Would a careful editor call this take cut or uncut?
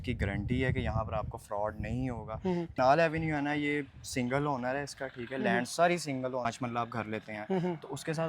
cut